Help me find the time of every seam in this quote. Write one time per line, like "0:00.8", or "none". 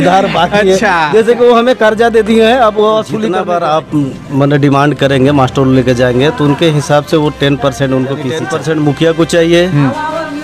0:03.3
0:08.4